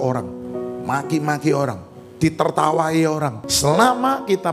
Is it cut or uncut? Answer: cut